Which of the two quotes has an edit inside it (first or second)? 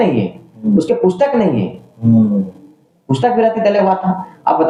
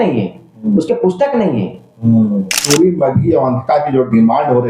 second